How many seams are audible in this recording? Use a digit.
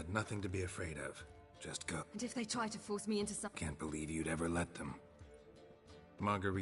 2